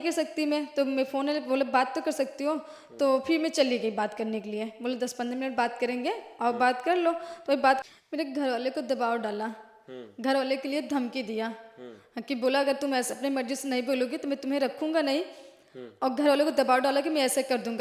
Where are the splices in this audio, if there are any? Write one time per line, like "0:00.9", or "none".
0:07.8